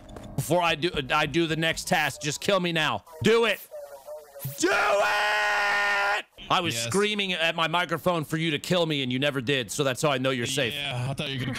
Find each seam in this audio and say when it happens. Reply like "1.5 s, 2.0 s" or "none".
3.1 s, 6.3 s